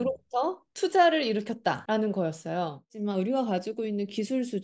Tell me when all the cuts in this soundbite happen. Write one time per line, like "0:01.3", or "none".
0:01.8
0:02.9